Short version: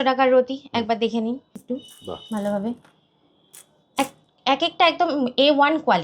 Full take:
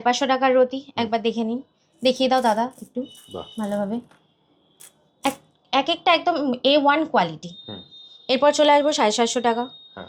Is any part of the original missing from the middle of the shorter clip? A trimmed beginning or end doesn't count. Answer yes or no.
yes